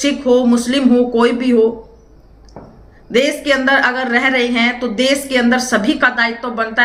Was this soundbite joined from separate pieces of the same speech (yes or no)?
no